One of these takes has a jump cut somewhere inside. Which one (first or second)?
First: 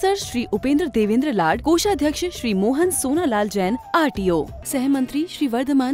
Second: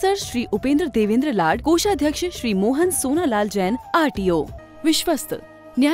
second